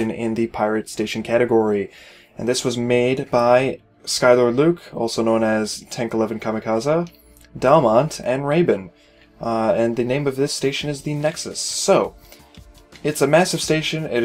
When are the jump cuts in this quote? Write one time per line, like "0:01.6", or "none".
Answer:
none

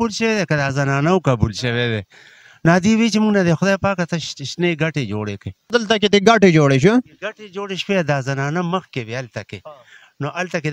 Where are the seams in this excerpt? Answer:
0:05.7

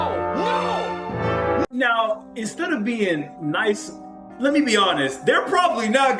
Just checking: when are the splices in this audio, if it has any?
0:01.7

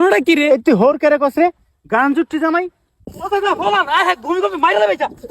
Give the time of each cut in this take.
0:03.3

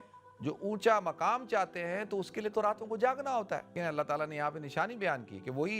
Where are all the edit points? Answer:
0:03.8

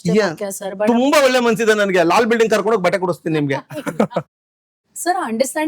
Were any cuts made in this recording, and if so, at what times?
0:04.3

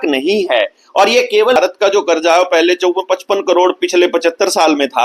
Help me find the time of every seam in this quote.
0:01.6

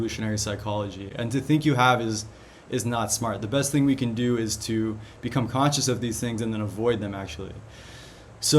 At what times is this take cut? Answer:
none

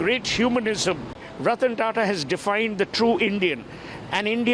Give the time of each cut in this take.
0:01.3

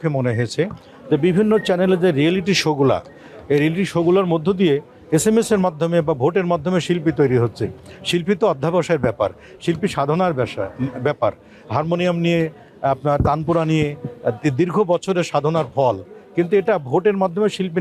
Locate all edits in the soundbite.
none

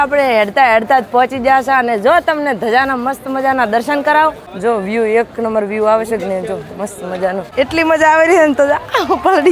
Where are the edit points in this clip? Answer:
0:04.5
0:07.4

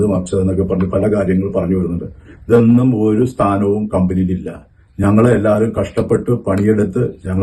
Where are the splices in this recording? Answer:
none

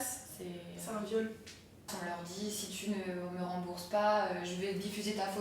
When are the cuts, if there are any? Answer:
0:01.9

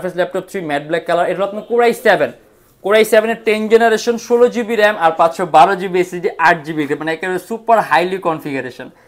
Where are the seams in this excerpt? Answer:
none

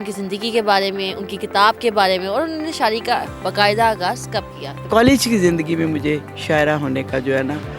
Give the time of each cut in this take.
0:04.8

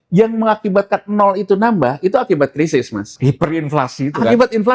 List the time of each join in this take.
0:03.1

